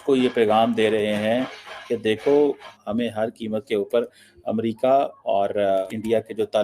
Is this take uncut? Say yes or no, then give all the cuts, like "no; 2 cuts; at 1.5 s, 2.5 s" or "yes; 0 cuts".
no; 2 cuts; at 2.7 s, 5.8 s